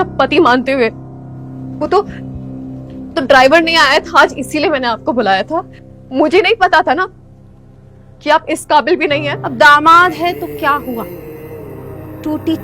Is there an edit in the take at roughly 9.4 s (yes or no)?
yes